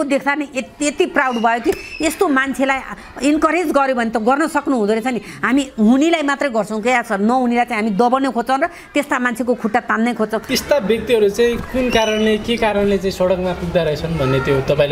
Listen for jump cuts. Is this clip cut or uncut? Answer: cut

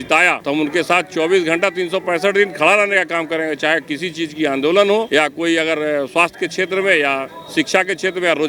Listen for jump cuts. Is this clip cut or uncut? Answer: uncut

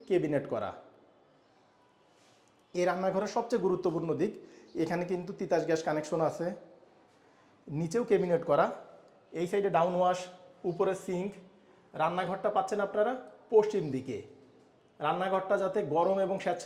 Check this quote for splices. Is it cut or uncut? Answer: uncut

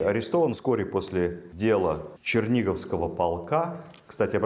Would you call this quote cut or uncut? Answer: uncut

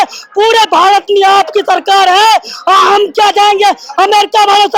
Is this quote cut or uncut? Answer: uncut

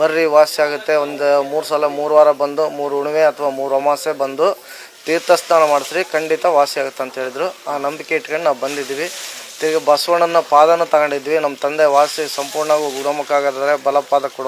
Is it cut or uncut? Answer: uncut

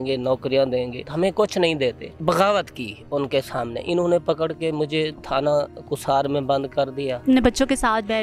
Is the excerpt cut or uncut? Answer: cut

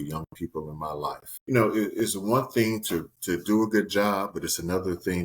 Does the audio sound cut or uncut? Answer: cut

